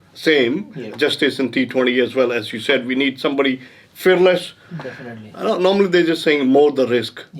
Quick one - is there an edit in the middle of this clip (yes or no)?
no